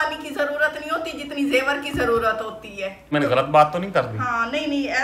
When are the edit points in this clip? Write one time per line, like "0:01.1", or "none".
0:03.1